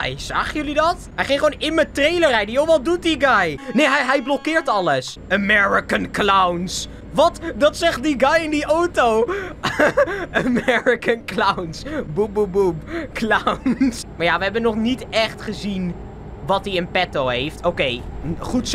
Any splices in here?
yes; 4 cuts; at 1.1 s, 3.6 s, 5.2 s, 14.0 s

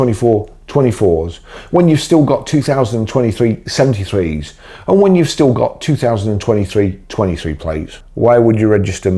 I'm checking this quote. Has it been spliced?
yes; 1 cut; at 8.0 s

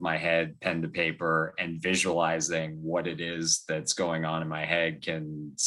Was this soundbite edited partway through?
no; 0 cuts

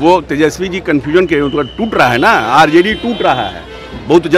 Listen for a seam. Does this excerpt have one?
no; 0 cuts

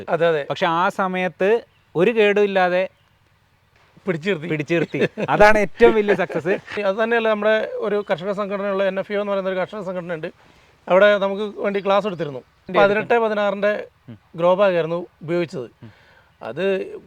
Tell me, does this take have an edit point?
yes; 2 cuts; at 6.8 s, 12.7 s

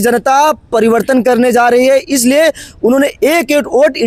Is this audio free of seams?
yes; 0 cuts

